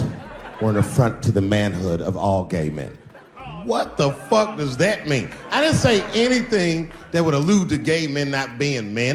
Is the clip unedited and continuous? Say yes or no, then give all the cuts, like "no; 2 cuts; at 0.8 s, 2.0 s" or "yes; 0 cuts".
yes; 0 cuts